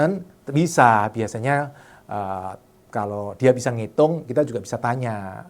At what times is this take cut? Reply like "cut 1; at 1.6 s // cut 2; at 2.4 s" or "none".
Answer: none